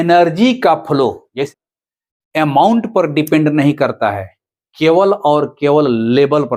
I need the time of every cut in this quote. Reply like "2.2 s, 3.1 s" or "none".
1.5 s